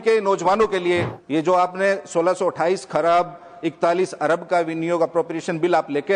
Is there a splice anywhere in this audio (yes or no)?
yes